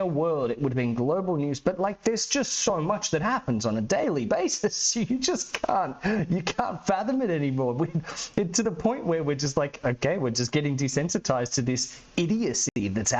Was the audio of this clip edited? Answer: no; 0 cuts

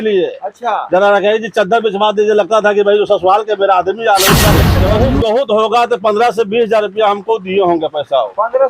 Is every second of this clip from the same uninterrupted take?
no; 1 cut; at 4.7 s

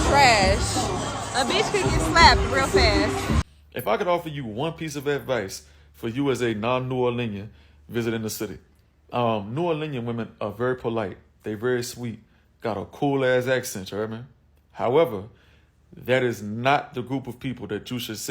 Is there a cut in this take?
yes; 1 cut; at 3.4 s

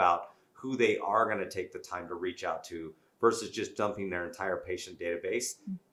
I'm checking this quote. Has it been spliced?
no; 0 cuts

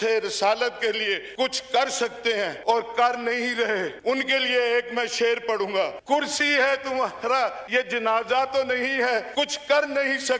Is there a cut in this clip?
yes; 6 cuts; at 1.3 s, 2.6 s, 3.9 s, 6.0 s, 7.6 s, 9.3 s

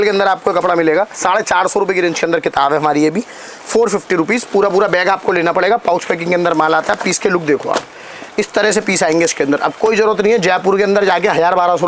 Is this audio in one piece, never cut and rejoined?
yes; 0 cuts

